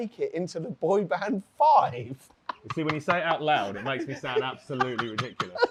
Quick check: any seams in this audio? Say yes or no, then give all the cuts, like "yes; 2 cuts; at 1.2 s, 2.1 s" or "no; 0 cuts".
no; 0 cuts